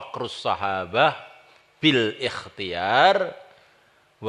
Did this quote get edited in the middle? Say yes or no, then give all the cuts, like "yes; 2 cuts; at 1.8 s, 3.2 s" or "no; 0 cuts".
no; 0 cuts